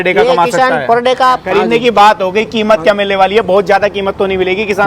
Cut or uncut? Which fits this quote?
cut